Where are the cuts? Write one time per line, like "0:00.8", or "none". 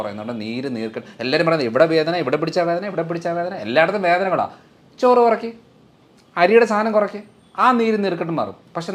none